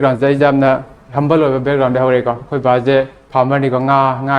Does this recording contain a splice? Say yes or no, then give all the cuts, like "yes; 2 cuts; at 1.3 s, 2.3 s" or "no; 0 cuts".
yes; 1 cut; at 3.2 s